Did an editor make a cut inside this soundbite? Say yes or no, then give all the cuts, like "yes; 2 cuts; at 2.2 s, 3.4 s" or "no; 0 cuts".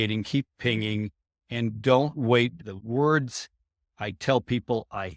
yes; 1 cut; at 2.7 s